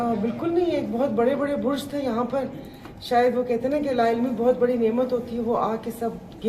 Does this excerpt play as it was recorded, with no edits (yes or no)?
yes